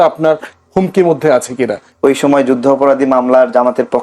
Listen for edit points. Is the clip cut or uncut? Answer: cut